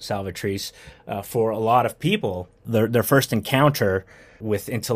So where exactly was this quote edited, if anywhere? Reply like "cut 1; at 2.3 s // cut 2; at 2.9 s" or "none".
cut 1; at 2.7 s